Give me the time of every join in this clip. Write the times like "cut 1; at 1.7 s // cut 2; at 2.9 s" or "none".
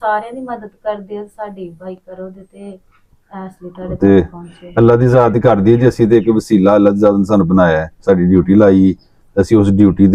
none